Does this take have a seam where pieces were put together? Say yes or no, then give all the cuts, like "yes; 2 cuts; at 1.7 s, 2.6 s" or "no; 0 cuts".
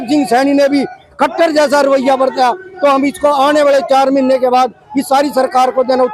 no; 0 cuts